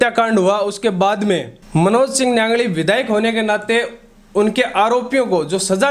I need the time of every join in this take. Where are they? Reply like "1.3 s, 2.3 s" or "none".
1.6 s